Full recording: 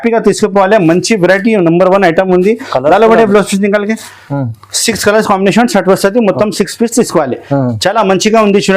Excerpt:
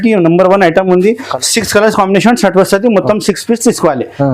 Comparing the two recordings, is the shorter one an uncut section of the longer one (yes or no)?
no